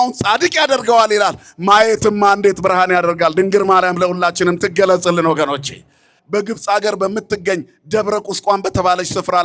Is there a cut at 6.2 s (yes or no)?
yes